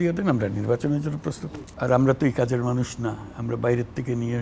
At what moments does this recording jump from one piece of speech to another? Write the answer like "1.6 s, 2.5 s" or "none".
1.3 s